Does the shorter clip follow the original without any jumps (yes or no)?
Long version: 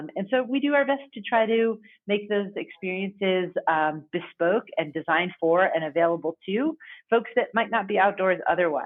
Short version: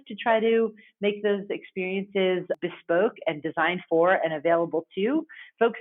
no